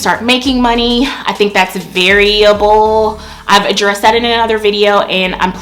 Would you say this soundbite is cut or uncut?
uncut